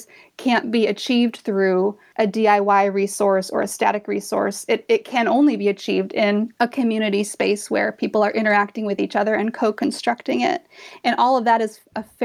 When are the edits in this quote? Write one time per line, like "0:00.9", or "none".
0:02.0
0:06.5